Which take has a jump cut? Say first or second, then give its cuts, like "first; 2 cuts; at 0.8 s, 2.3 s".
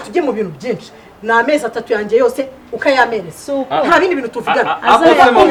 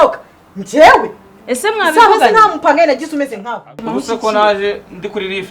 second; 1 cut; at 3.8 s